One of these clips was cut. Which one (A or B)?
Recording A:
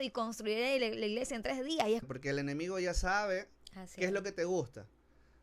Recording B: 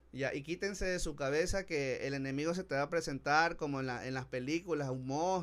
A